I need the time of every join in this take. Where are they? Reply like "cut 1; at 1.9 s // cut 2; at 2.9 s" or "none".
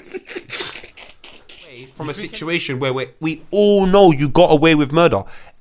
cut 1; at 2.0 s